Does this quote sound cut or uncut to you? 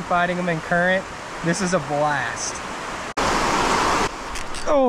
cut